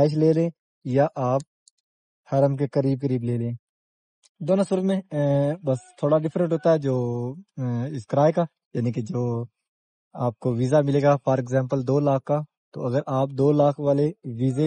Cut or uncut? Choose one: uncut